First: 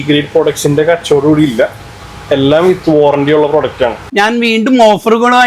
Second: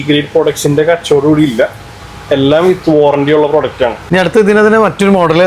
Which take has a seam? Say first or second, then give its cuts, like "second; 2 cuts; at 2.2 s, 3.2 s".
first; 1 cut; at 4.0 s